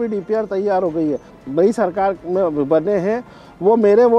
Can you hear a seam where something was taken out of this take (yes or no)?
yes